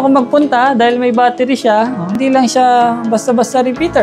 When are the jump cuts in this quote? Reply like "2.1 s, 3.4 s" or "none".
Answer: 2.2 s